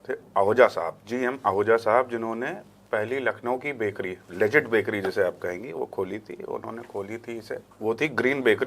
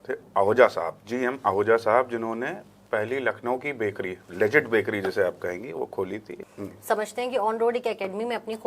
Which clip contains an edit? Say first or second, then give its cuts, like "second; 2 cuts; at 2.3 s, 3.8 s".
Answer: second; 1 cut; at 6.3 s